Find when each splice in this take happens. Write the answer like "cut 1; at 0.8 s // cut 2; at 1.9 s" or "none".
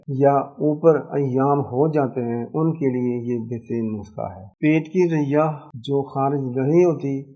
none